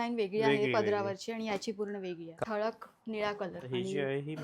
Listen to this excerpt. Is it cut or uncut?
cut